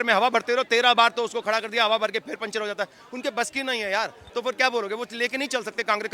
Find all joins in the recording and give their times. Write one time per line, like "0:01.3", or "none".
0:04.2